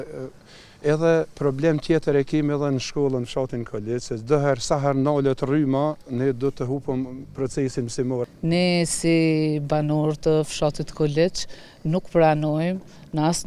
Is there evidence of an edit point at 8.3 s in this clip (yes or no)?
yes